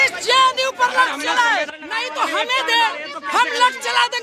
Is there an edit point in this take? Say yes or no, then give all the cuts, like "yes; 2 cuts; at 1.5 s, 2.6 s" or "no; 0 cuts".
yes; 1 cut; at 1.8 s